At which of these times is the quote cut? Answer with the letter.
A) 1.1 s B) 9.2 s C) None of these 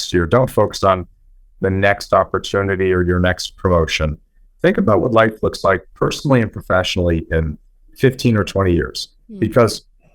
C